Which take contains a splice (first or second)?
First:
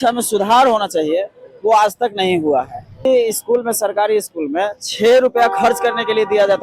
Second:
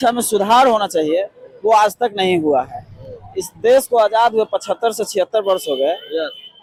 first